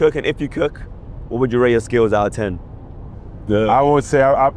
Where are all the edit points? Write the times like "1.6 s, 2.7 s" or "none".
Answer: none